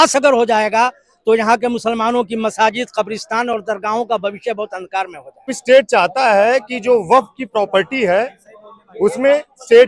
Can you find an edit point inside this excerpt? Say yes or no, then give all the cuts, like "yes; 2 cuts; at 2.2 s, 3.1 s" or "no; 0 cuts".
yes; 1 cut; at 5.6 s